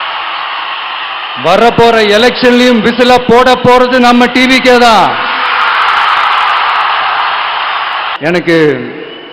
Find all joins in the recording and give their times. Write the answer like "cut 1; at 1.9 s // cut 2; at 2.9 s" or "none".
cut 1; at 8.1 s